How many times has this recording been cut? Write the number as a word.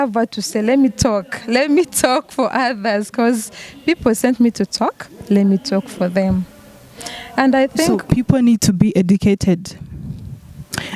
one